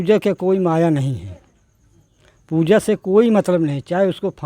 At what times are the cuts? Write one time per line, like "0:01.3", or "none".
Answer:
none